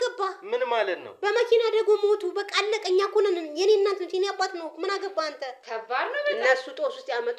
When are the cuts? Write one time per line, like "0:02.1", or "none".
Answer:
0:05.6